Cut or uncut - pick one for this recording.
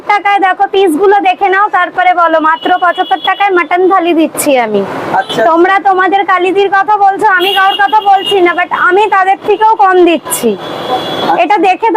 uncut